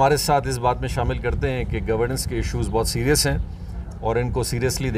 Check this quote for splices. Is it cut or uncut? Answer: uncut